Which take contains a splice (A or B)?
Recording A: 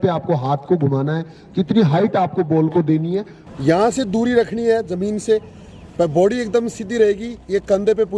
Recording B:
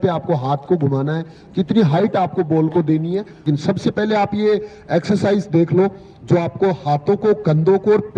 A